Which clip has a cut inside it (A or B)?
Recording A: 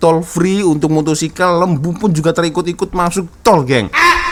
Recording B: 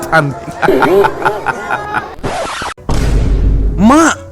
B